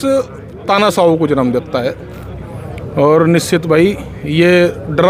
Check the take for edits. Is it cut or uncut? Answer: uncut